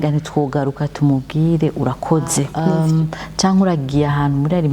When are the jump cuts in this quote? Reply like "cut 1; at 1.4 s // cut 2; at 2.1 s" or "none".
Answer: cut 1; at 2.6 s